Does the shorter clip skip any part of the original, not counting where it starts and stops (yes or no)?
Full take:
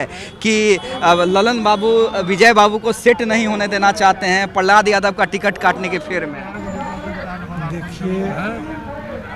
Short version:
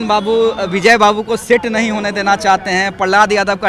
no